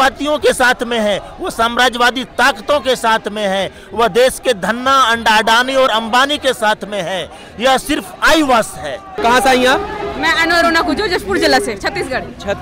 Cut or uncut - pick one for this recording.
uncut